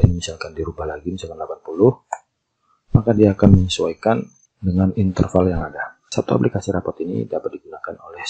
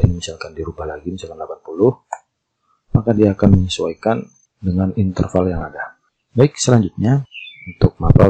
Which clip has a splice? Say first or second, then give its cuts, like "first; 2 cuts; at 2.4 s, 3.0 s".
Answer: first; 1 cut; at 6.0 s